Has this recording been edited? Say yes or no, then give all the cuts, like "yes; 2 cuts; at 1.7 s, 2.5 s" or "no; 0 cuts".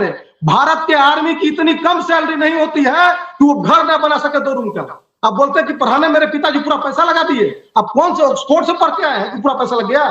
no; 0 cuts